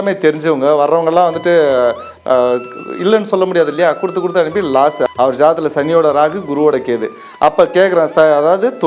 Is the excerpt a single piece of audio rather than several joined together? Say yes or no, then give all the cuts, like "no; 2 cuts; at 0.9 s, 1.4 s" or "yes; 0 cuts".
no; 1 cut; at 5.1 s